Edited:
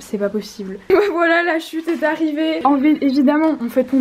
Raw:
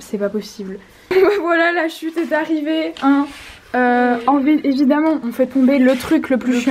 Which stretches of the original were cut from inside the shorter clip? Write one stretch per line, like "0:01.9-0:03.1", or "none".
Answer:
0:00.9-0:01.2
0:02.9-0:04.2